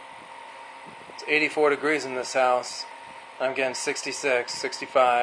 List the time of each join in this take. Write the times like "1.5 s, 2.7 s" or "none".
none